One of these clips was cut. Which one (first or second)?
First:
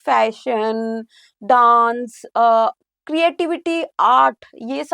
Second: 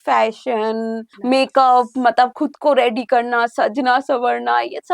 second